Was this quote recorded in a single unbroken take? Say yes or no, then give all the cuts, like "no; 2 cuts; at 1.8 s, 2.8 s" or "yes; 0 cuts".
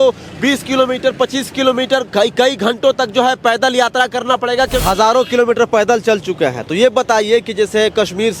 no; 1 cut; at 4.8 s